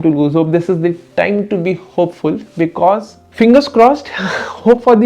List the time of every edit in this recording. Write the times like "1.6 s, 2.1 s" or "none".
3.2 s